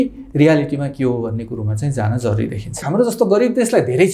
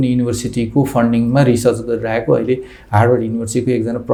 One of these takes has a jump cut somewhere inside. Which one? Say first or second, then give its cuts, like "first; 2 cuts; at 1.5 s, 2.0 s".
first; 1 cut; at 2.9 s